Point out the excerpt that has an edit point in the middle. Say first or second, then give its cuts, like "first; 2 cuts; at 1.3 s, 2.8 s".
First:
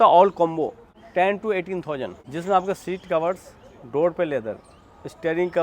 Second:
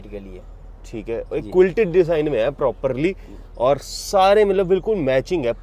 first; 2 cuts; at 1.0 s, 2.2 s